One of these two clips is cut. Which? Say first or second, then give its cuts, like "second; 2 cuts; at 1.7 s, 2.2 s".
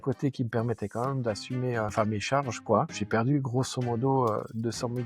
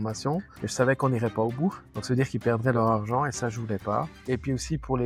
first; 2 cuts; at 1.9 s, 2.9 s